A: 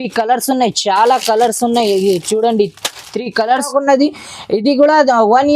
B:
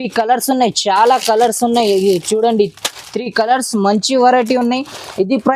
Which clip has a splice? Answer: A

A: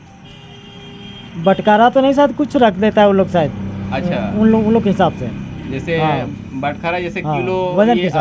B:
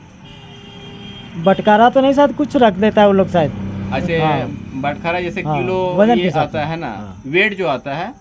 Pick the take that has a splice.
B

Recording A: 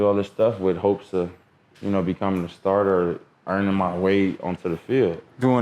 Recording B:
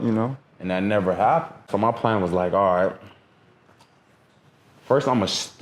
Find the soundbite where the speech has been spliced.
B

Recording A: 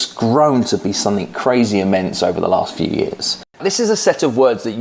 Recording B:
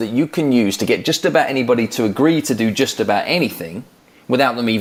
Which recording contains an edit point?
A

